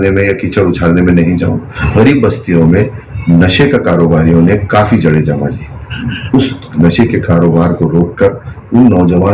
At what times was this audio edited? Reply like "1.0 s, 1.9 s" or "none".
1.7 s